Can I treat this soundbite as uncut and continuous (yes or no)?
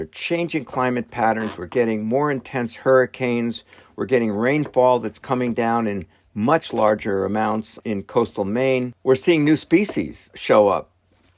no